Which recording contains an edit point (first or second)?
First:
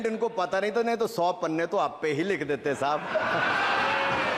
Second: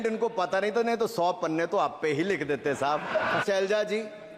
second